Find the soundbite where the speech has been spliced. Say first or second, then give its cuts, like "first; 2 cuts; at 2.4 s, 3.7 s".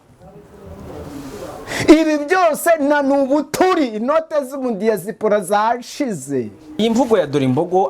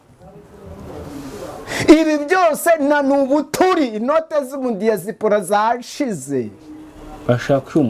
first; 1 cut; at 6.8 s